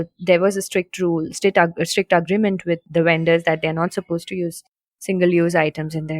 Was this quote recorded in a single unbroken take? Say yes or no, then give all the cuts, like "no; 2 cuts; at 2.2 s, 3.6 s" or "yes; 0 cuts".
no; 1 cut; at 2.8 s